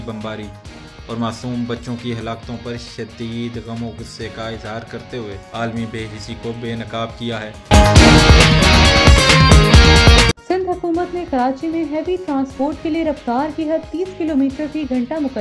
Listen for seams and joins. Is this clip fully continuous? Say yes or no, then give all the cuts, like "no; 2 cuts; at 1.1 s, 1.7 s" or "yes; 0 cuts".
no; 2 cuts; at 7.5 s, 10.4 s